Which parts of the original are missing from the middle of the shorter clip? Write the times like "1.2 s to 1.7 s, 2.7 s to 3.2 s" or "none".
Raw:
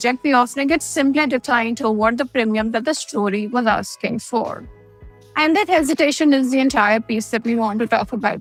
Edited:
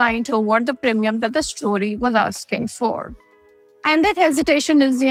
none